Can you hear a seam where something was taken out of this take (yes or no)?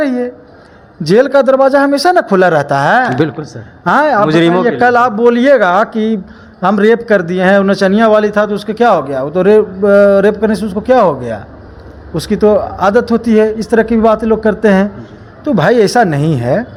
no